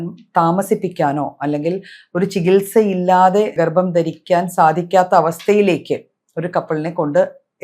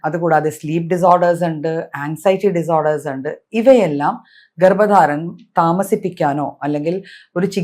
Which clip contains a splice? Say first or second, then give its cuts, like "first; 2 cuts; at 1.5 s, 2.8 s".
first; 1 cut; at 3.5 s